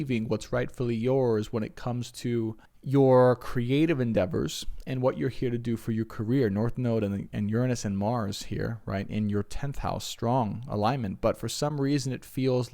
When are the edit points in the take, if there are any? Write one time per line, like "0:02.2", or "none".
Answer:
0:02.7